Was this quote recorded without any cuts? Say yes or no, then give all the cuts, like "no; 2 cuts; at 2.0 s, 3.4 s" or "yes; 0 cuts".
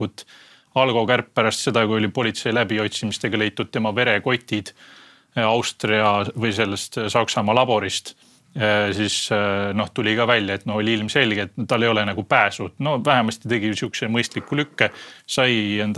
yes; 0 cuts